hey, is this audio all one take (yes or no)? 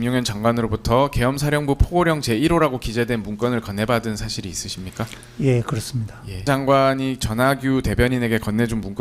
no